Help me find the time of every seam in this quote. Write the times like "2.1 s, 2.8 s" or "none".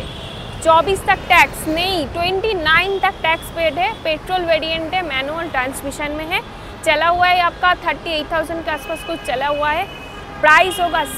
none